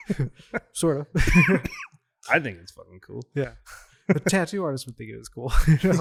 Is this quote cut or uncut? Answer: uncut